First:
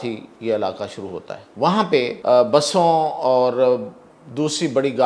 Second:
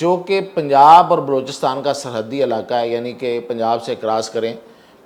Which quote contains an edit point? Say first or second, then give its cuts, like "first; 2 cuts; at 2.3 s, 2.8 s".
first; 2 cuts; at 1.4 s, 2.2 s